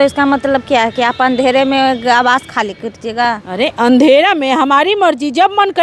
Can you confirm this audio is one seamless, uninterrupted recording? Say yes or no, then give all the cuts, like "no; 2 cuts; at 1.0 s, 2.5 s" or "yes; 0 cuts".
yes; 0 cuts